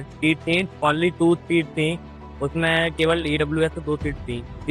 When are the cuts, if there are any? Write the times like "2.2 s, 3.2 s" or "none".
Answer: none